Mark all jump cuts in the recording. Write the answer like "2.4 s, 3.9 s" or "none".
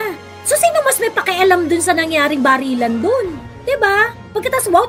none